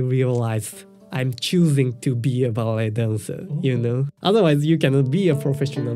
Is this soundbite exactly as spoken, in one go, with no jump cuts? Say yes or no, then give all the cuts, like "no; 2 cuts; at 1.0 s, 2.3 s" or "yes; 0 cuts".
no; 1 cut; at 4.1 s